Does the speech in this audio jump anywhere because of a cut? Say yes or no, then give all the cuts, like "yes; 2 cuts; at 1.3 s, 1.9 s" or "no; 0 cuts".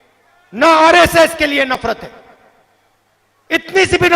no; 0 cuts